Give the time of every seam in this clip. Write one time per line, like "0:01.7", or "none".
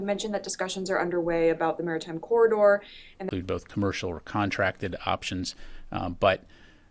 none

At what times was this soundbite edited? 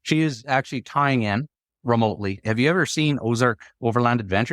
0:02.4

